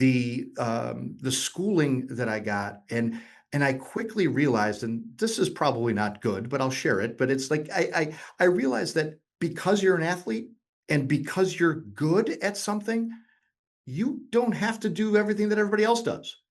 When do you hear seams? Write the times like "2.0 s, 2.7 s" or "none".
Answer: none

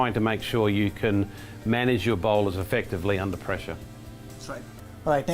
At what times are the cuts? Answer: none

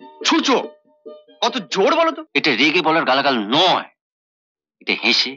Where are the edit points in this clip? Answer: 2.3 s

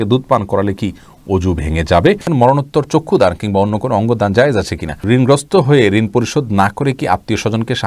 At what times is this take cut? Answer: 2.2 s, 5.0 s

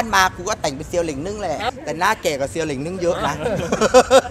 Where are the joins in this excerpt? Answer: 1.6 s

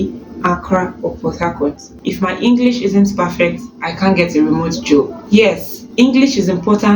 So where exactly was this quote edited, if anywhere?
1.9 s

